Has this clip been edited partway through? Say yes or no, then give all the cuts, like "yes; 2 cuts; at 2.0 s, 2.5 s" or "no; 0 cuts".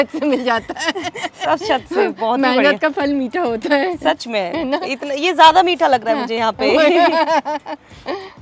no; 0 cuts